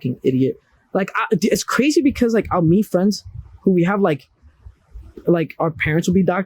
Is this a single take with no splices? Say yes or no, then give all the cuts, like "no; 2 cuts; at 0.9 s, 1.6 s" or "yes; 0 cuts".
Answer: yes; 0 cuts